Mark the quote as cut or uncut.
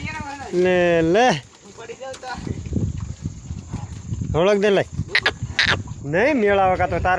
cut